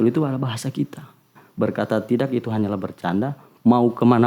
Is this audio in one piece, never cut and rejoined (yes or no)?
no